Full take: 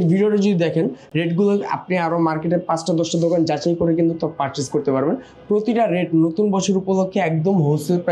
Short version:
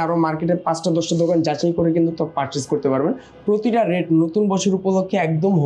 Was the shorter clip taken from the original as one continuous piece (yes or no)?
yes